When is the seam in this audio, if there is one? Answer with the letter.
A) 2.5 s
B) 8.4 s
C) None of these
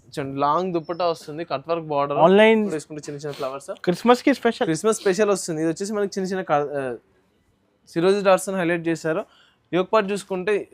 A